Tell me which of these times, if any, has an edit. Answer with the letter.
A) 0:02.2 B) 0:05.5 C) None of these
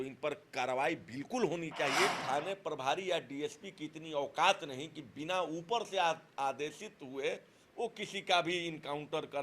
A